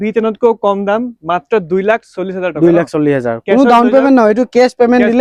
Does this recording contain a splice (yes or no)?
no